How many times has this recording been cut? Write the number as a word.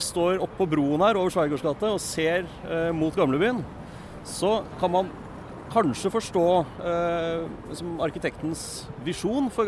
zero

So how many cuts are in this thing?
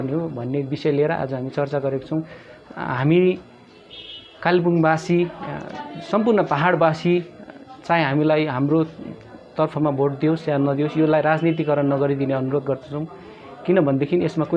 zero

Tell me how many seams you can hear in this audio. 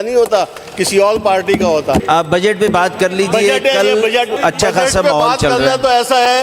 two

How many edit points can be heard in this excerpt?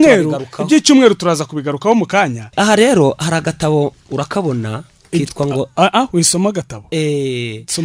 one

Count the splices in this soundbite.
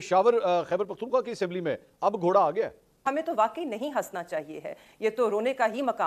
one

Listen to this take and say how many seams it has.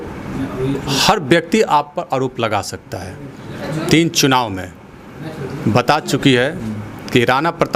one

